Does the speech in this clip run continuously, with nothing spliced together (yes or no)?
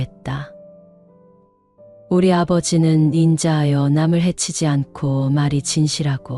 yes